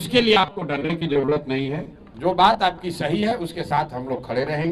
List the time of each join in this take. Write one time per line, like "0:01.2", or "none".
0:02.1